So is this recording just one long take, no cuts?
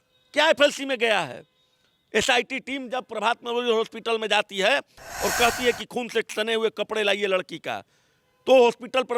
yes; 0 cuts

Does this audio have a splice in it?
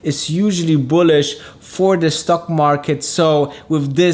no; 0 cuts

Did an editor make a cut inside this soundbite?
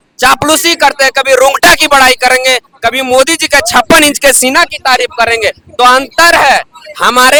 no; 0 cuts

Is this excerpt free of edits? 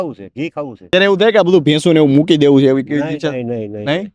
no; 1 cut; at 0.9 s

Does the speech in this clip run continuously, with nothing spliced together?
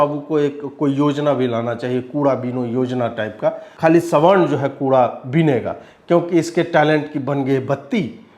no; 1 cut; at 3.7 s

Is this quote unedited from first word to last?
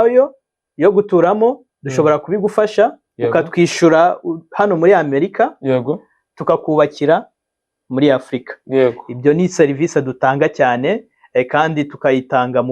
yes; 0 cuts

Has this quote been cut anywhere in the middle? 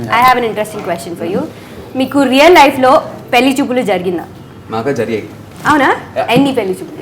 no; 0 cuts

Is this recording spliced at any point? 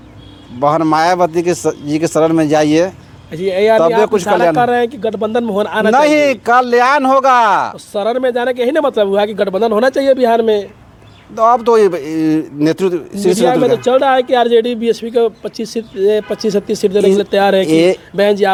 no; 0 cuts

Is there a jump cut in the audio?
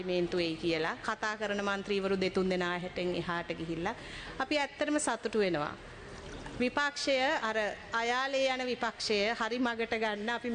no; 0 cuts

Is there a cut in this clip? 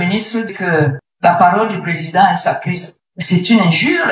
no; 0 cuts

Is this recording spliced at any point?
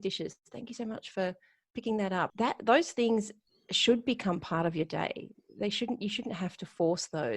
yes; 1 cut; at 2.3 s

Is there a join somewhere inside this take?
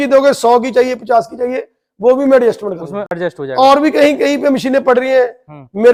no; 0 cuts

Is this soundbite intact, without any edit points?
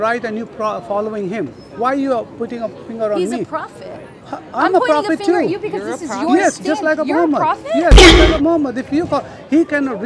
yes; 0 cuts

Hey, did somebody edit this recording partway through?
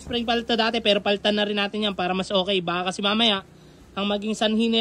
no; 0 cuts

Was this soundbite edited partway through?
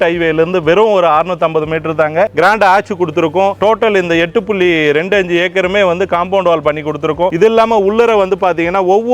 yes; 1 cut; at 2.3 s

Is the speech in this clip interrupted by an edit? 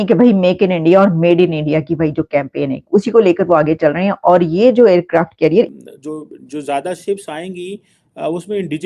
yes; 1 cut; at 5.7 s

